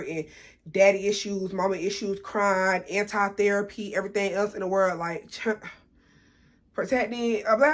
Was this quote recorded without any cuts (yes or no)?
yes